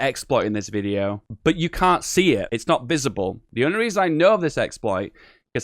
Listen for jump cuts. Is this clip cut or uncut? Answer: cut